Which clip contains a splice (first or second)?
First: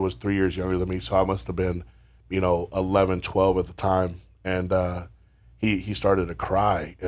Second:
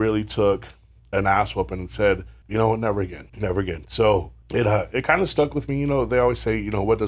second